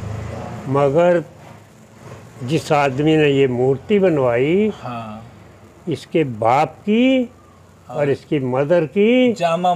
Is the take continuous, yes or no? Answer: yes